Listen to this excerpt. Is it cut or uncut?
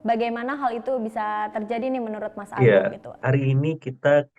cut